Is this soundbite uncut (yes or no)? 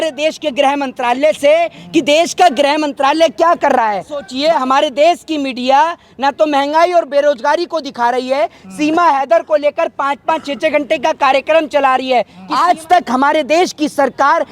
no